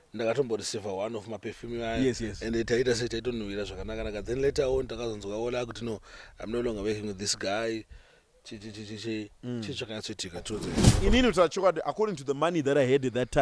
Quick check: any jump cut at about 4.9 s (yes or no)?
no